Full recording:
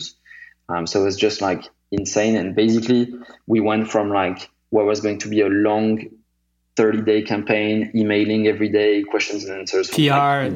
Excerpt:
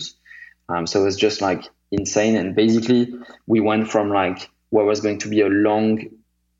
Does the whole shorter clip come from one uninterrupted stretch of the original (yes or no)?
yes